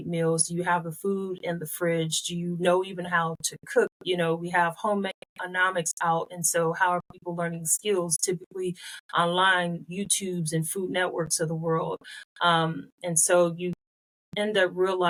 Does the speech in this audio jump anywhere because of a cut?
no; 0 cuts

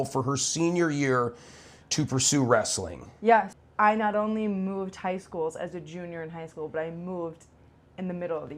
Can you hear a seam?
yes; 1 cut; at 3.5 s

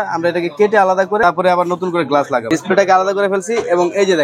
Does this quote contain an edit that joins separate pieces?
yes; 2 cuts; at 1.2 s, 2.4 s

